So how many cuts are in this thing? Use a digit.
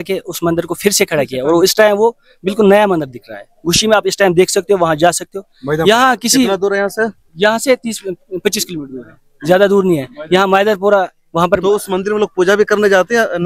0